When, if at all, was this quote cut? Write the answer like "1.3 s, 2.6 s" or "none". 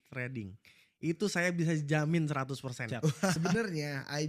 3.4 s